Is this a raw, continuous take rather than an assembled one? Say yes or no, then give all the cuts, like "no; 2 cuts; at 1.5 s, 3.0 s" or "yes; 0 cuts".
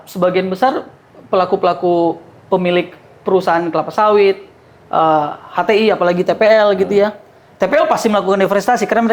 yes; 0 cuts